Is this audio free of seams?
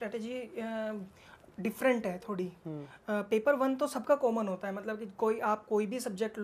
yes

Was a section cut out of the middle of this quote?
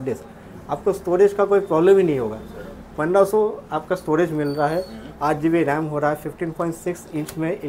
no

